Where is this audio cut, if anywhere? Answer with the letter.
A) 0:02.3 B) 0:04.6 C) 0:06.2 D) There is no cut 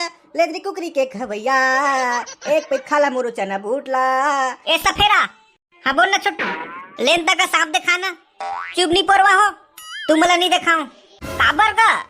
B